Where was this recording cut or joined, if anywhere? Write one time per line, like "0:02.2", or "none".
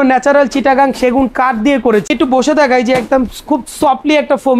0:02.1